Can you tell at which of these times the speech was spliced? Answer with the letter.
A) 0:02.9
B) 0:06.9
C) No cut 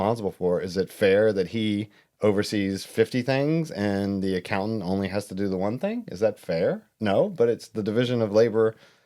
B